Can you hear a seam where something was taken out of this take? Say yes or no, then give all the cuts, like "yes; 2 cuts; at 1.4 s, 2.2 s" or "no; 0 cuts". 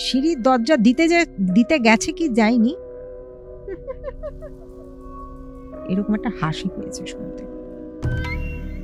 no; 0 cuts